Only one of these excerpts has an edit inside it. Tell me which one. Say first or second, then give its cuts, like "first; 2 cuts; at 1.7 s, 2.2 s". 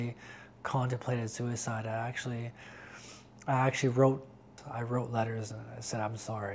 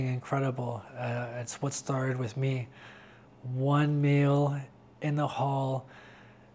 first; 1 cut; at 4.6 s